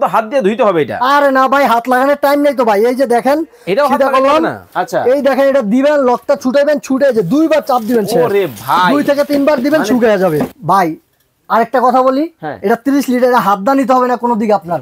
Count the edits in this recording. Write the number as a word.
two